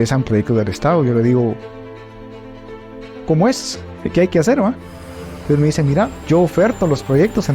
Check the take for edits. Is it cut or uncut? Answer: cut